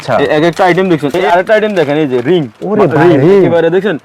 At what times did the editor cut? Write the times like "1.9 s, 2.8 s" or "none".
1.1 s